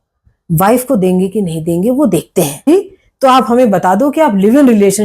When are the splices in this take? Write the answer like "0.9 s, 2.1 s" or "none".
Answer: 2.7 s